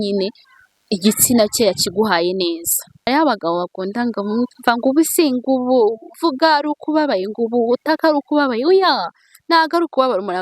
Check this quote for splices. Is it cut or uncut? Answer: cut